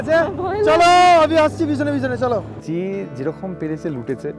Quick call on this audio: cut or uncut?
cut